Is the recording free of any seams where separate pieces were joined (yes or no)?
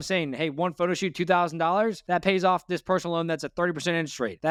yes